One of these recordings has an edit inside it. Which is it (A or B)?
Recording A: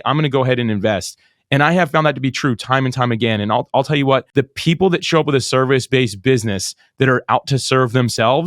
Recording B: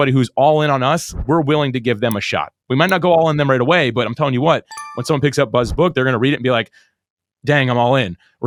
A